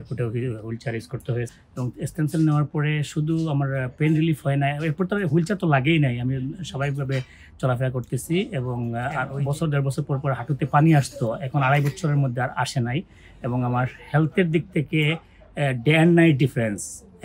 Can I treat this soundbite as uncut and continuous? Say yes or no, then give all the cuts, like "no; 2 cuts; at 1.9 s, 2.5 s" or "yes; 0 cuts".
no; 1 cut; at 1.5 s